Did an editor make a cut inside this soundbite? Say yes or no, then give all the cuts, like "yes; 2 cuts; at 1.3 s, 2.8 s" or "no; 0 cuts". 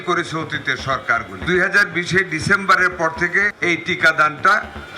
yes; 2 cuts; at 1.3 s, 3.5 s